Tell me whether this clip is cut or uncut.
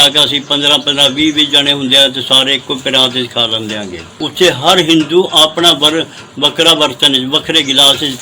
cut